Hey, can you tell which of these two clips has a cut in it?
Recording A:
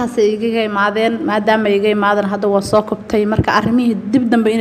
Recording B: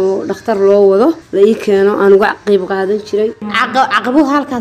B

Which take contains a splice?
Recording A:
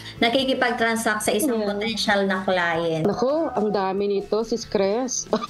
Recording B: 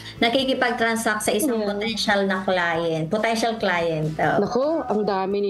A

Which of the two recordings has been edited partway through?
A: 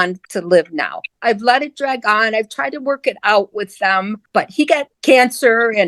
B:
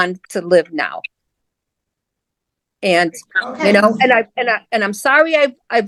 A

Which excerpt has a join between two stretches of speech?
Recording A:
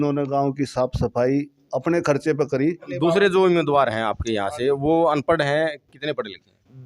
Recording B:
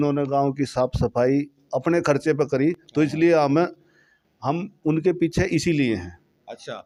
A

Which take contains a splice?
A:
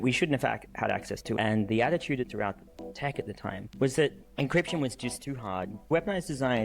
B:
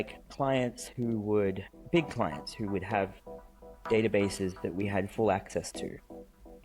A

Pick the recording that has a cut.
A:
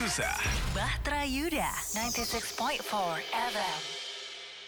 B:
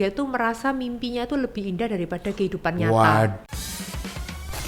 B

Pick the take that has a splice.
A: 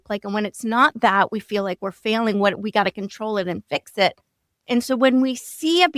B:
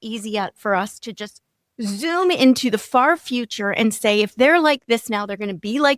A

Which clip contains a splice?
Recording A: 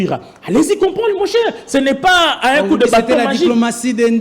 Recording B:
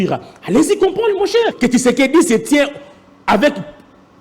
B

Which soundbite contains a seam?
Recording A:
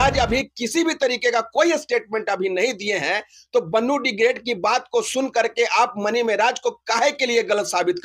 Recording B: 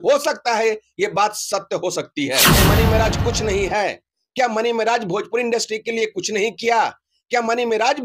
B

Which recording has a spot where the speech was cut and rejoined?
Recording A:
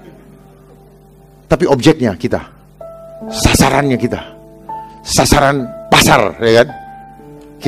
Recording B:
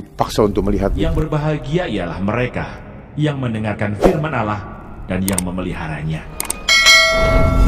B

